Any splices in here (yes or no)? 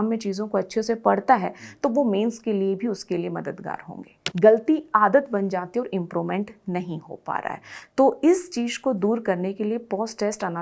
yes